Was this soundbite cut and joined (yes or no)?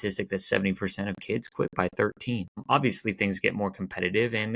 yes